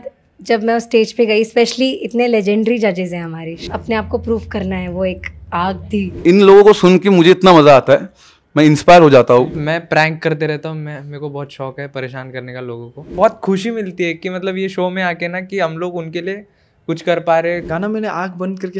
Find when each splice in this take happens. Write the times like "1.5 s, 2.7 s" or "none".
3.5 s, 6.2 s, 9.6 s, 13.1 s, 17.6 s